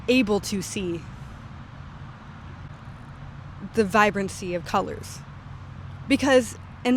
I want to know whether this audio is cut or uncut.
uncut